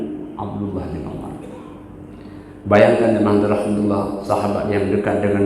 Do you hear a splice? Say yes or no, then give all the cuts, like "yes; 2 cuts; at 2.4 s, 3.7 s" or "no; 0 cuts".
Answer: no; 0 cuts